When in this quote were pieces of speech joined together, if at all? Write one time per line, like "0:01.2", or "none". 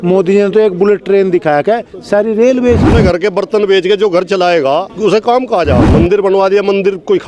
0:02.9
0:04.9
0:05.8